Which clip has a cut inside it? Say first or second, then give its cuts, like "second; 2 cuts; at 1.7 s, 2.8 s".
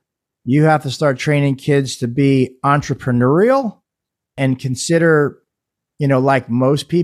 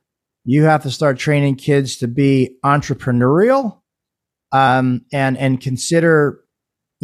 first; 1 cut; at 4.4 s